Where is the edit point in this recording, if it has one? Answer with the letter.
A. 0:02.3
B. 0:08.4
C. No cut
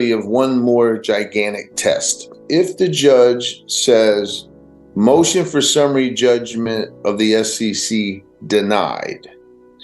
A